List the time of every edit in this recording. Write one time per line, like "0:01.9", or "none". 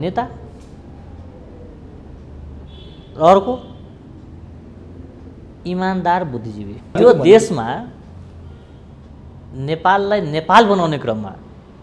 0:07.0